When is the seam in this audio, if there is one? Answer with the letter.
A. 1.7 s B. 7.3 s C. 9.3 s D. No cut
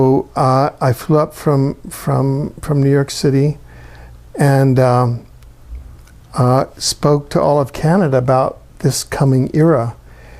D